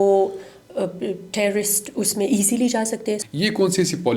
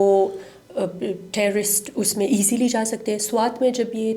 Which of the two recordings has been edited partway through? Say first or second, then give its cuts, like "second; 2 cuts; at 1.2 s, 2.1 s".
first; 1 cut; at 3.2 s